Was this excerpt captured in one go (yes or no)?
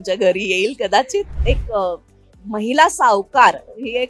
no